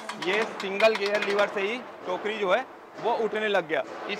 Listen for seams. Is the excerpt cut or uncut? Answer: uncut